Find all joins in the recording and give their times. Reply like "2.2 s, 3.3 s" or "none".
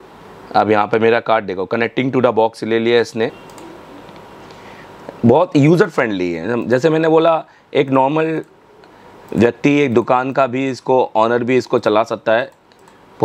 3.3 s